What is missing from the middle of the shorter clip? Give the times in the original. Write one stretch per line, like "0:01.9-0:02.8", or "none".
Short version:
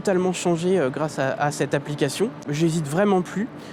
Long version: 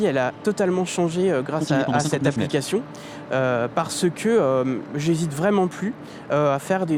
0:03.0-0:04.9

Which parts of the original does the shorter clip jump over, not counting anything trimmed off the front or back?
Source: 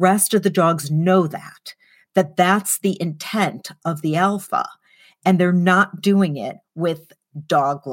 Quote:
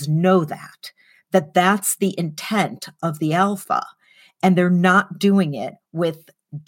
none

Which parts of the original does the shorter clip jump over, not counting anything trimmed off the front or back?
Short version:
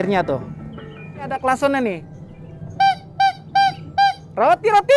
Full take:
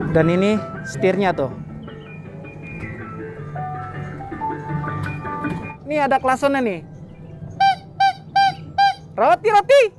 0:02.4-0:06.1

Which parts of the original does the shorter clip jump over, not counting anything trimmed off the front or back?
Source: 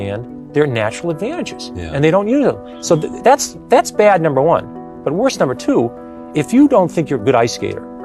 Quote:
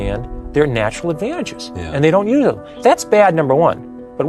0:02.7-0:03.5

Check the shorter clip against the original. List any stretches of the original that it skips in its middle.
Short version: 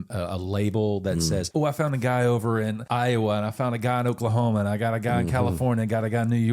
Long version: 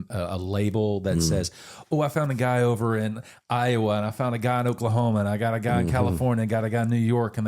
0:01.5-0:01.8
0:03.2-0:03.4

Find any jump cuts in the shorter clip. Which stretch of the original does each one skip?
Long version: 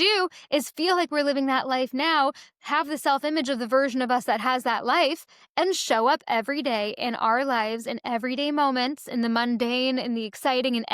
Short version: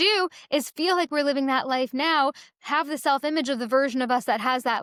none

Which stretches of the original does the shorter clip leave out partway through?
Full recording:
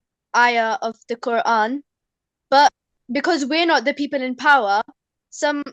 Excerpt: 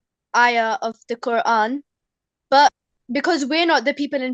none

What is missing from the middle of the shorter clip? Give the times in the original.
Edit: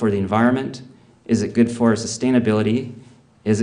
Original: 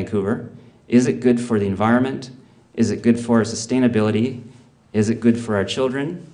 none

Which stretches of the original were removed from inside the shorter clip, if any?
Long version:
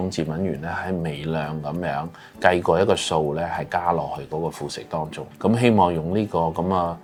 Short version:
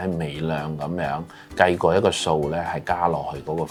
none

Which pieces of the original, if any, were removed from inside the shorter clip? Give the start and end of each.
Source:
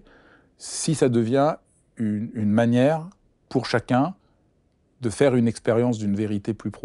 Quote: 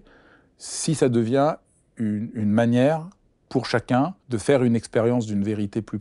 0:04.3-0:05.0

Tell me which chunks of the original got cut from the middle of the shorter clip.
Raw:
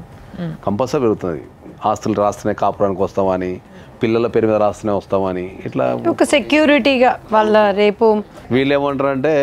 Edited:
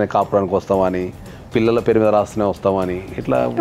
none

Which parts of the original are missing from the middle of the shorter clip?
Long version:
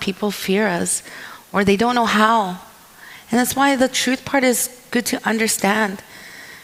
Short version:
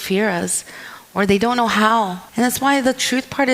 0:02.6-0:03.2

